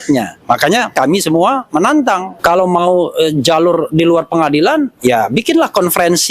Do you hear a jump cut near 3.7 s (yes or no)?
no